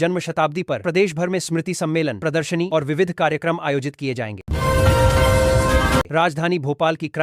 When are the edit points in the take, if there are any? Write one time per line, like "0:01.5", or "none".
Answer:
0:04.4
0:06.1